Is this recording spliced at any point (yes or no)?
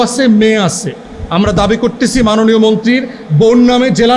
no